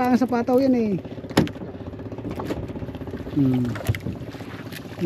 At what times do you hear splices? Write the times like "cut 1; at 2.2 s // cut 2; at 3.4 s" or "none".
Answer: none